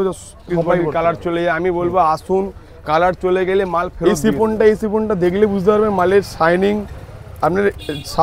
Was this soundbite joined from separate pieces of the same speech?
yes; 2 cuts; at 0.9 s, 3.9 s

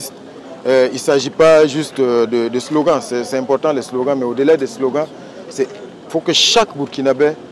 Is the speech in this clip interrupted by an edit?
no; 0 cuts

